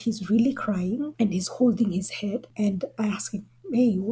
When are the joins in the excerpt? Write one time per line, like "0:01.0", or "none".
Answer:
none